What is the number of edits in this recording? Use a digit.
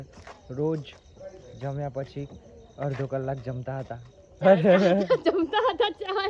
0